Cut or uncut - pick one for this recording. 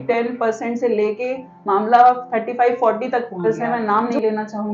cut